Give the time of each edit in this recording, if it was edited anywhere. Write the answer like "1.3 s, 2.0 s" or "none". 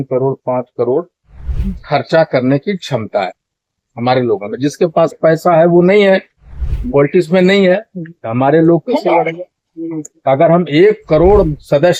none